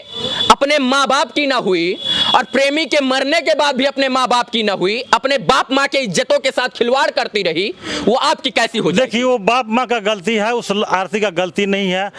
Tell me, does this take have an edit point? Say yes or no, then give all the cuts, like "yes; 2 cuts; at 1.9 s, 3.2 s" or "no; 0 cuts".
no; 0 cuts